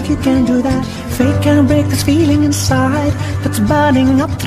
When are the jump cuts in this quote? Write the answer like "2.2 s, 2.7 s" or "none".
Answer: 1.2 s

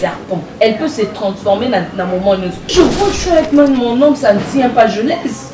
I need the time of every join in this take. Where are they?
2.6 s

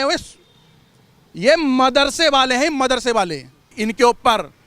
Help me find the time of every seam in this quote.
3.8 s

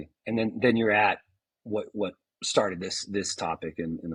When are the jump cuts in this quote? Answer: none

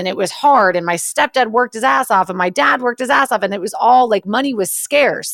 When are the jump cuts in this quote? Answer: none

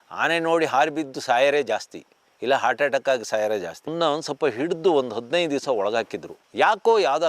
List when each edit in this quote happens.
3.8 s

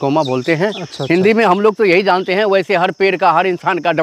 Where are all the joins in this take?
none

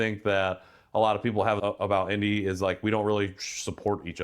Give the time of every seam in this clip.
1.6 s

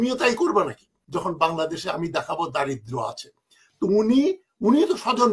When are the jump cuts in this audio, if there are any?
1.0 s

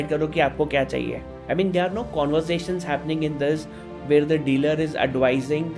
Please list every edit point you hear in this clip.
1.3 s

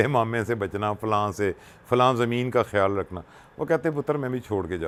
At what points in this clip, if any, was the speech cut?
none

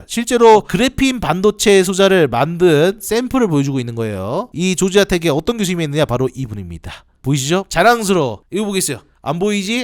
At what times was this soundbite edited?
4.5 s, 8.4 s

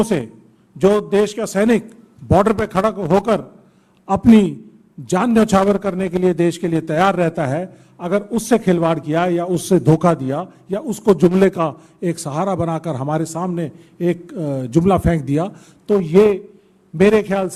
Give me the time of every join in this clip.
none

